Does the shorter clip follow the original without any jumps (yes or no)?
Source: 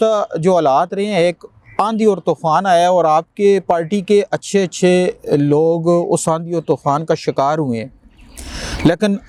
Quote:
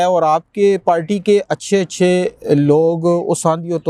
yes